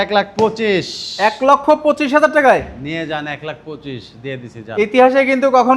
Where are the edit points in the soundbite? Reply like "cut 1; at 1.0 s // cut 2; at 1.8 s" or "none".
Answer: none